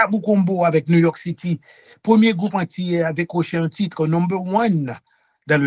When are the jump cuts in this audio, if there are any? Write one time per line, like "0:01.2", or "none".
none